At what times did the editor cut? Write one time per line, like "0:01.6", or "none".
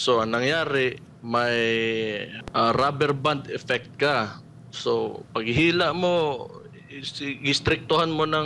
0:02.3